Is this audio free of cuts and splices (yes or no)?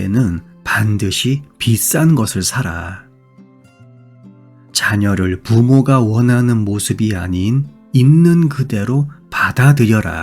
no